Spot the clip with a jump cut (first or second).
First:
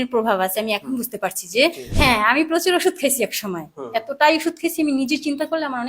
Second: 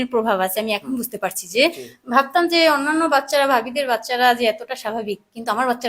first